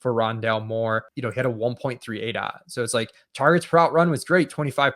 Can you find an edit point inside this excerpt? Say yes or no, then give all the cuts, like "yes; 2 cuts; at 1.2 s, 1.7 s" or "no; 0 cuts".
yes; 1 cut; at 1.1 s